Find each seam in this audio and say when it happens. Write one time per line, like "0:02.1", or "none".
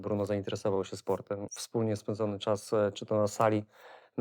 0:01.5